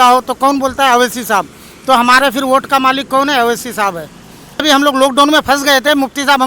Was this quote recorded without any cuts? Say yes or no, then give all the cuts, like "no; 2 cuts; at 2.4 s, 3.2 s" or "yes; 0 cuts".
no; 1 cut; at 4.6 s